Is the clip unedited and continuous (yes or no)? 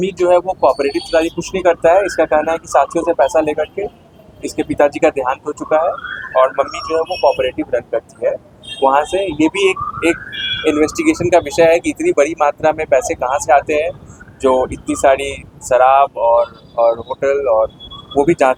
yes